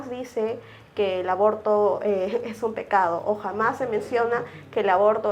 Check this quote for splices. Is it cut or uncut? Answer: uncut